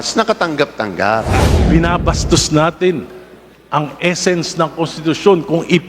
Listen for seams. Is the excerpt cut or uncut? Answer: cut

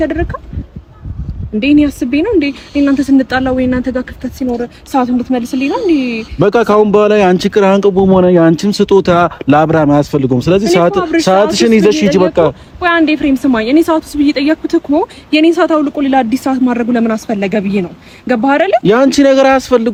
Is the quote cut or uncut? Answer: uncut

